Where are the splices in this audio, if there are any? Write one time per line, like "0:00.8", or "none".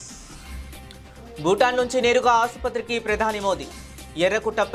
0:01.1